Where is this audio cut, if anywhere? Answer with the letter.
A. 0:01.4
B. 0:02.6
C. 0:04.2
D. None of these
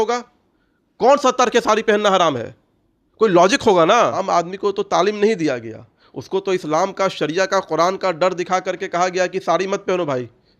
C